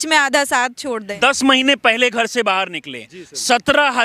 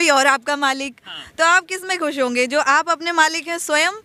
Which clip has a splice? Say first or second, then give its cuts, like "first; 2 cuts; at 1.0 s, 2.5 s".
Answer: first; 1 cut; at 1.1 s